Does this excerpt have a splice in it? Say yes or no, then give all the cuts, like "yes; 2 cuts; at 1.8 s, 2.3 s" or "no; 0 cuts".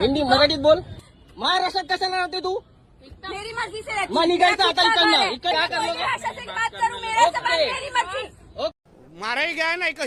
yes; 3 cuts; at 1.1 s, 5.5 s, 8.8 s